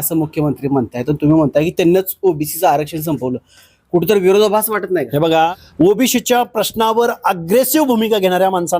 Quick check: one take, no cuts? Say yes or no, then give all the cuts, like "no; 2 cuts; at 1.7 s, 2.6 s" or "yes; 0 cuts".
no; 1 cut; at 5.6 s